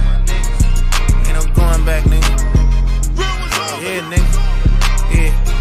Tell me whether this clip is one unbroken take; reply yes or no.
no